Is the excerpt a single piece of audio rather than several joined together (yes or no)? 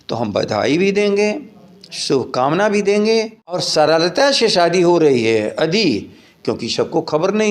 no